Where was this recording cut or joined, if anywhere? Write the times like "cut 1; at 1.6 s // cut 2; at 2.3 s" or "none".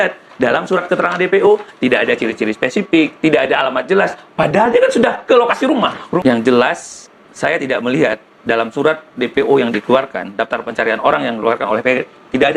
cut 1; at 6.2 s